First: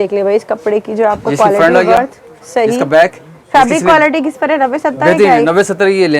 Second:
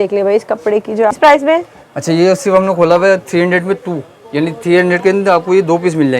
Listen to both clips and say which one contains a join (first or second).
second